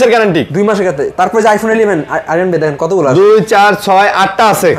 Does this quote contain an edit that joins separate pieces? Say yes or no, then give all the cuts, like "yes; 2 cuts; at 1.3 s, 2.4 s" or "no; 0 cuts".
no; 0 cuts